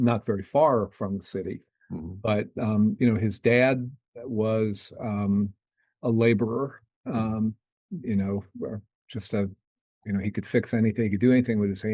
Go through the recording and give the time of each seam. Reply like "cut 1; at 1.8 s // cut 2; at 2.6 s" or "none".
none